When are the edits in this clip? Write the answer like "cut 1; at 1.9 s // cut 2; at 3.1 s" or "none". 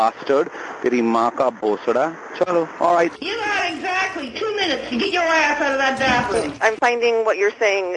cut 1; at 3.1 s // cut 2; at 6.5 s